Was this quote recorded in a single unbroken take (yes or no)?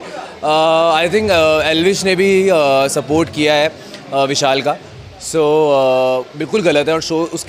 yes